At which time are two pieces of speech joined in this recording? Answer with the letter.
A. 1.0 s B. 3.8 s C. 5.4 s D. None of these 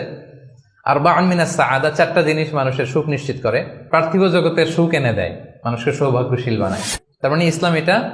B